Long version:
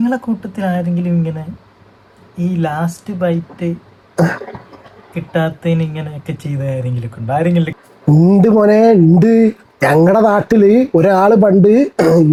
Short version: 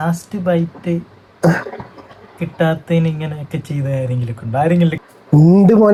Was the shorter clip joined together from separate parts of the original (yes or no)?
no